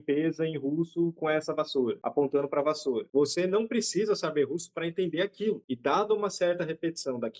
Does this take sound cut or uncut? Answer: uncut